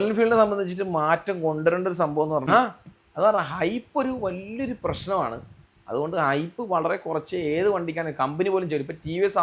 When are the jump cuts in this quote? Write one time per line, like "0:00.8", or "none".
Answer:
0:02.4